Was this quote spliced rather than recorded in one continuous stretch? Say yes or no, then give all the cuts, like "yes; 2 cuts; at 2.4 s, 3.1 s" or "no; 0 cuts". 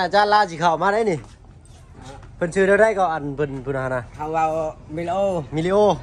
no; 0 cuts